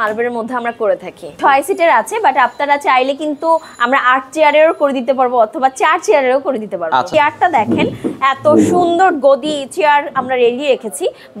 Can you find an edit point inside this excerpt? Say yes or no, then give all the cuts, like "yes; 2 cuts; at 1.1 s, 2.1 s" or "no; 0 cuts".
yes; 2 cuts; at 1.3 s, 7.1 s